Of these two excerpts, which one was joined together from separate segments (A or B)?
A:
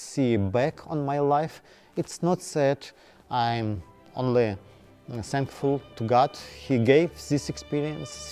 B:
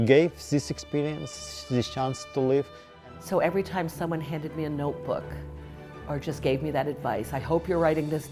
B